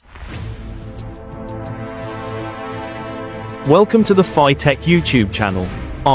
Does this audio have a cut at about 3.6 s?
yes; 1 cut; at 3.6 s

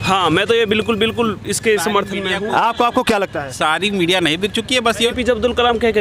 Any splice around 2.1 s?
no; 1 cut; at 5.1 s

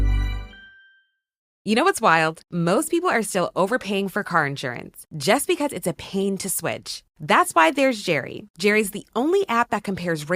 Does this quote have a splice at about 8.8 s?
no; 1 cut; at 1.5 s

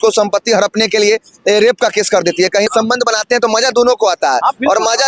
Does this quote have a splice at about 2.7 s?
yes; 1 cut; at 2.7 s

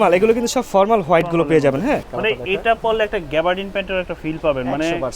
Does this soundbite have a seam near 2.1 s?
yes; 1 cut; at 2.1 s

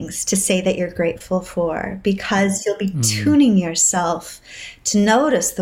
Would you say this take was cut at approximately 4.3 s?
no; 0 cuts

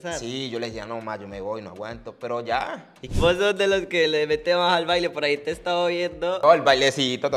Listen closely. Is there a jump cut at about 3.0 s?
yes; 2 cuts; at 3.0 s, 6.4 s

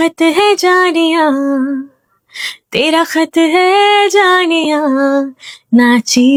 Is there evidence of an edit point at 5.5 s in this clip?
no; 0 cuts

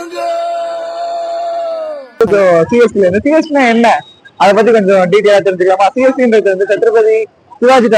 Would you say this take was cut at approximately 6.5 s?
no; 1 cut; at 2.2 s

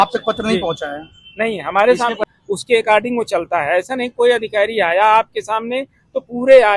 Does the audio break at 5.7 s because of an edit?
no; 1 cut; at 2.2 s

